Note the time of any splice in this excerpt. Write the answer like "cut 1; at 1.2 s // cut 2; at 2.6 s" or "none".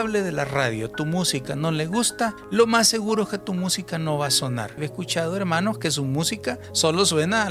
cut 1; at 4.8 s